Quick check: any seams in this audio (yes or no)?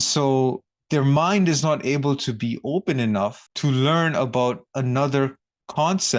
no